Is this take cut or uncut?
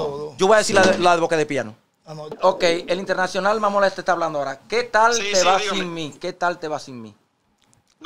cut